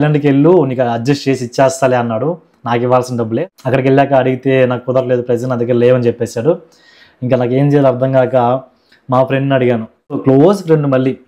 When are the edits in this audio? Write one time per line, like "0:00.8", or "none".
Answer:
0:03.4
0:10.2